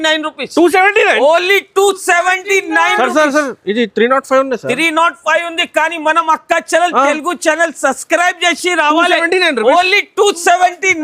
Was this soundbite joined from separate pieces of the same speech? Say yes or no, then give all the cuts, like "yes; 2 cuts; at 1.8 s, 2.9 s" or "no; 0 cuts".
no; 0 cuts